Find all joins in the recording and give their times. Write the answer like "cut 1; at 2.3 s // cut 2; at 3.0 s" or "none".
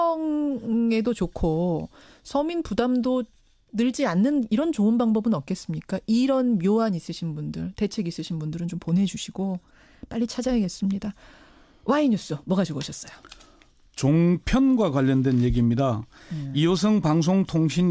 cut 1; at 10.6 s